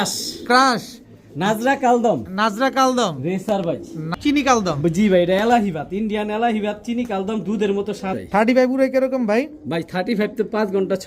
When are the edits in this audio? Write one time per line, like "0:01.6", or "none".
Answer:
0:04.1
0:08.1